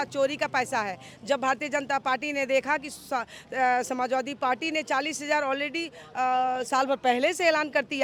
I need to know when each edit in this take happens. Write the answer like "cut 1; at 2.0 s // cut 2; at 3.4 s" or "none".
none